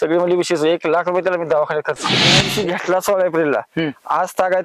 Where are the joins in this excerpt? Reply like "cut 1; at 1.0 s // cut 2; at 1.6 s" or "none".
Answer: cut 1; at 2.4 s

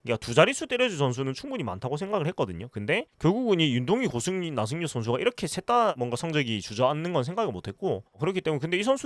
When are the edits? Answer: none

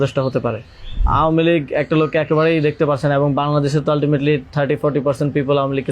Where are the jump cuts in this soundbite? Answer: cut 1; at 1.0 s

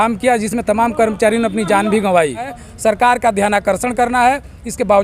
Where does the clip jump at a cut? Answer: cut 1; at 2.6 s

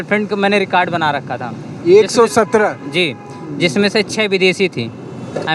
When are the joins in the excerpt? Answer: none

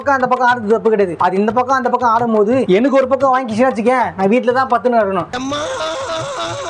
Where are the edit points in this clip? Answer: none

